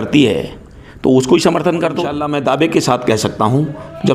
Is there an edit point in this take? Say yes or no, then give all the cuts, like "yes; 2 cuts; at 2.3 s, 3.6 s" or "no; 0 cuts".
yes; 1 cut; at 2.1 s